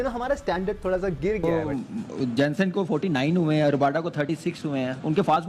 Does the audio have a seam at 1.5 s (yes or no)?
yes